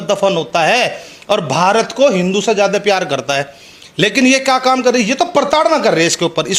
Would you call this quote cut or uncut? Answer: uncut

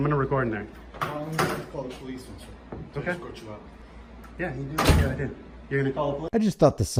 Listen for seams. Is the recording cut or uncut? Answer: uncut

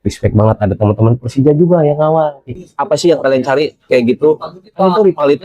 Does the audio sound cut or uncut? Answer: cut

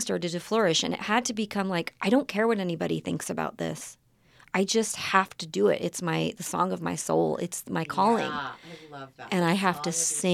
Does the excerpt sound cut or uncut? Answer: uncut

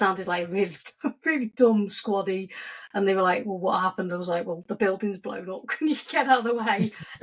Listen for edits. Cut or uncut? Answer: uncut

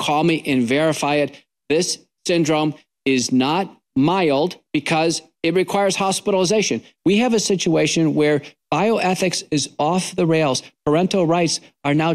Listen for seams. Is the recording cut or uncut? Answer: cut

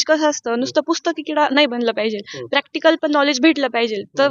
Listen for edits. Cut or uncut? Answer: uncut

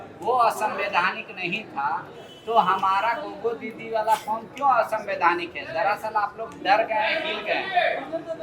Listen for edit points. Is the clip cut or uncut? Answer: uncut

